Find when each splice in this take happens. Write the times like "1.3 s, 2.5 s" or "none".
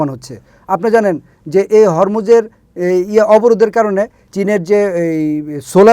4.2 s